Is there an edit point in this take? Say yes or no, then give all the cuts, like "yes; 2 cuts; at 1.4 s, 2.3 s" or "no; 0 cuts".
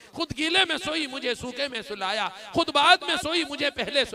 no; 0 cuts